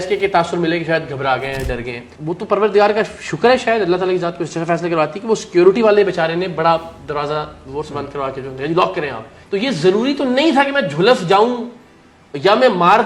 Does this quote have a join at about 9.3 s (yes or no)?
yes